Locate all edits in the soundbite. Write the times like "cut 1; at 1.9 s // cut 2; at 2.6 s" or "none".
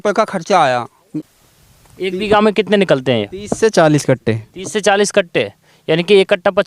cut 1; at 1.0 s